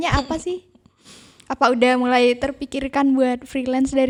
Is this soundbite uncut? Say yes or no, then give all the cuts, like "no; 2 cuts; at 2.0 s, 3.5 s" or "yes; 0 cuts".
yes; 0 cuts